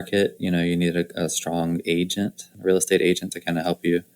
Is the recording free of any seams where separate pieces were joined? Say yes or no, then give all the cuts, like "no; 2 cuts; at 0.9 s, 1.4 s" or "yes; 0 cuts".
no; 1 cut; at 2.5 s